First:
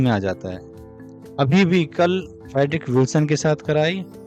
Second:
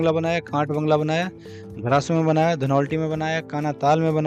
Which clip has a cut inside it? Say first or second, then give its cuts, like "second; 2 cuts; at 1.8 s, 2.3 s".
first; 1 cut; at 2.4 s